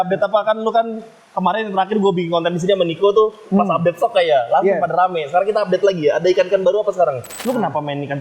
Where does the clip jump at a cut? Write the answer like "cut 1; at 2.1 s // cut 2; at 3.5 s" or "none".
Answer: cut 1; at 7.3 s